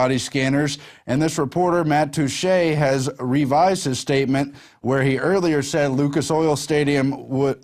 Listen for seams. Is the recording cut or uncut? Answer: uncut